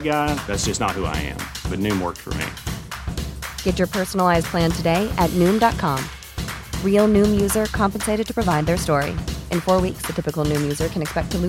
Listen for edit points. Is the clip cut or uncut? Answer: uncut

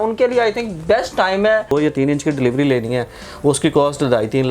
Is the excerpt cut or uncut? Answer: cut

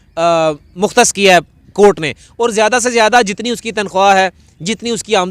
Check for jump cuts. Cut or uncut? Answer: uncut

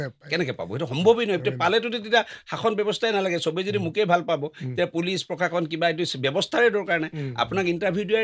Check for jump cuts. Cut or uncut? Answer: uncut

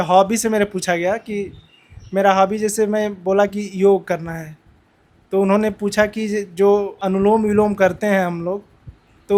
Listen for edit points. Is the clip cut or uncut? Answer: uncut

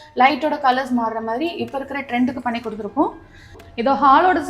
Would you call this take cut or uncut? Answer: cut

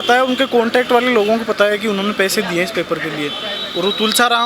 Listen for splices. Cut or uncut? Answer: uncut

